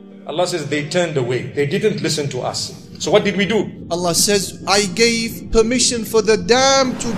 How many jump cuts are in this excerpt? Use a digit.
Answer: 1